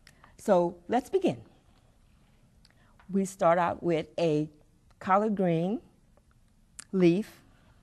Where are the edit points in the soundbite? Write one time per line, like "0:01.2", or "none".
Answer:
none

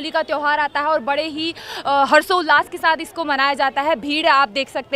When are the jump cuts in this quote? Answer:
none

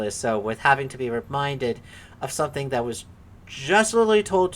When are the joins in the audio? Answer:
none

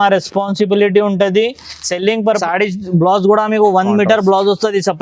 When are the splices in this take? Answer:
0:02.4

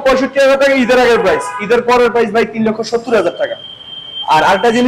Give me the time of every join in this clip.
none

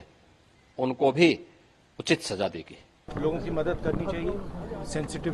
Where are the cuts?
0:03.1

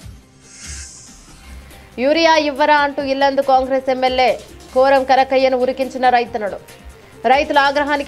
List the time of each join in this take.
0:01.9

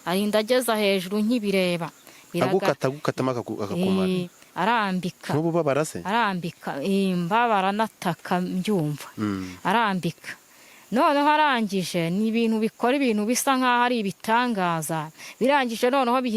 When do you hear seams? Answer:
0:04.4

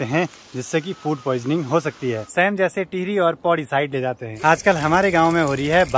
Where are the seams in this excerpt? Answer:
0:02.2
0:04.3

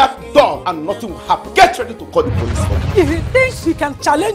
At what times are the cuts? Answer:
0:01.5
0:02.8

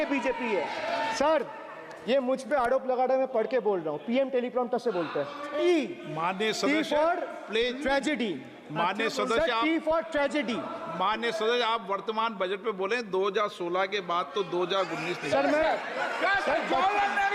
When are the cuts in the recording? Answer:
0:01.1
0:05.6

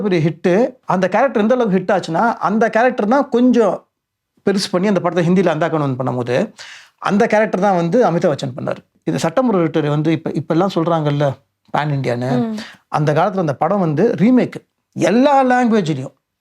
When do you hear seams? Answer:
0:08.9

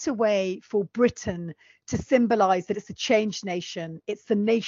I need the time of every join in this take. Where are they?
none

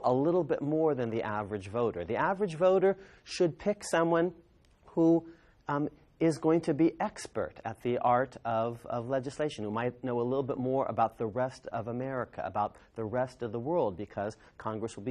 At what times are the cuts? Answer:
0:12.9

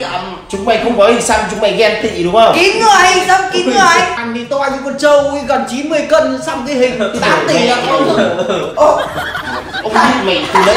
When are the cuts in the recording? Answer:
0:04.2

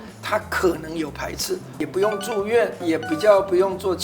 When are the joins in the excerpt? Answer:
0:01.8

